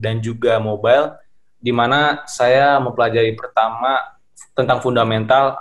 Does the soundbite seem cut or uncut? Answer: uncut